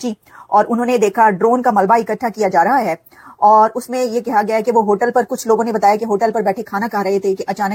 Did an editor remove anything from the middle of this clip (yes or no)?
no